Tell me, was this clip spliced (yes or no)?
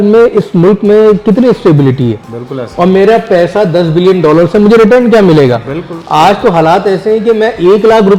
no